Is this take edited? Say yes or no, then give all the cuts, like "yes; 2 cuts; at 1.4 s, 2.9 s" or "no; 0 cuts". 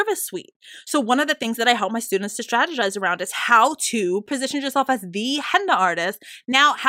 yes; 1 cut; at 4.3 s